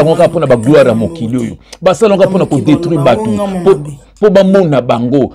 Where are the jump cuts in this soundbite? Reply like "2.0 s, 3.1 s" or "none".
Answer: none